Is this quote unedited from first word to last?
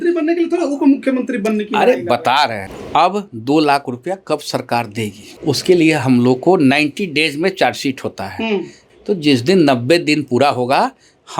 no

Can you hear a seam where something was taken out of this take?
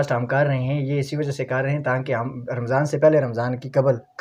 no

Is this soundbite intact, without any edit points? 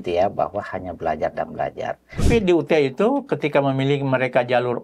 no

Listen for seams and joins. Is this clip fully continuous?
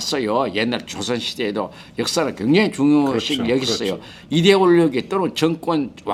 yes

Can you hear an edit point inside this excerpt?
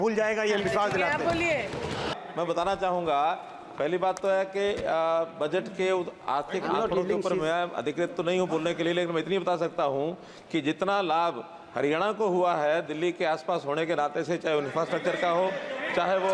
yes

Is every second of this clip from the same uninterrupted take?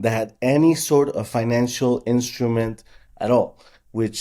yes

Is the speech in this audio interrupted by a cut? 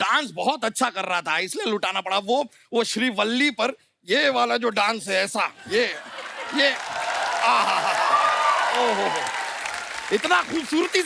no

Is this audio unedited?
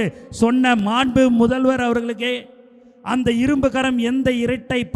yes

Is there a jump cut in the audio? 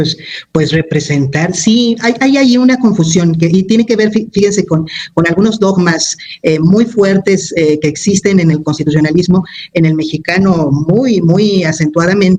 no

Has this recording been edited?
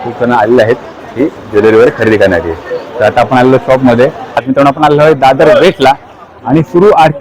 yes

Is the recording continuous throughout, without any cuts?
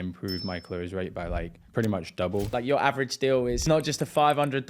no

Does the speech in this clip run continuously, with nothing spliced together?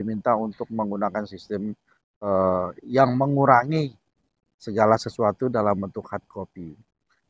yes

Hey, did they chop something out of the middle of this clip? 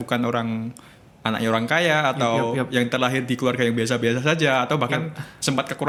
no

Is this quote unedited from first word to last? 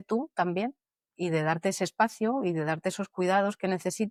yes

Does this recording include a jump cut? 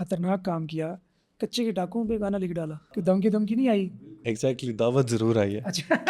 yes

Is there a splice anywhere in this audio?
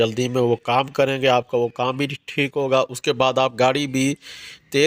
no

